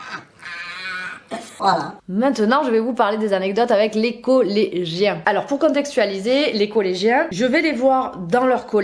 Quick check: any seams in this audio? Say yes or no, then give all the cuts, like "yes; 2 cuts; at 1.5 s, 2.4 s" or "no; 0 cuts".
no; 0 cuts